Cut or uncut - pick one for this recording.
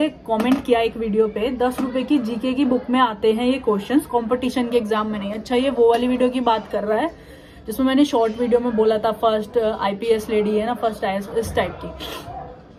uncut